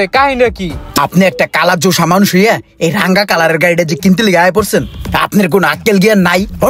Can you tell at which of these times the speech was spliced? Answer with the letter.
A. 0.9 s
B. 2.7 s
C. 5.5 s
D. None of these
A